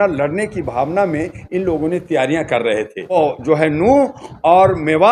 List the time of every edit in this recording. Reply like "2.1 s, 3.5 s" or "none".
3.2 s